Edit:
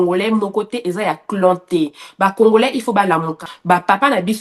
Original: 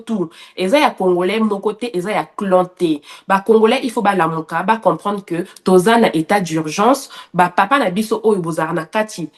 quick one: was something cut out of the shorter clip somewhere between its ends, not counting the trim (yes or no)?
yes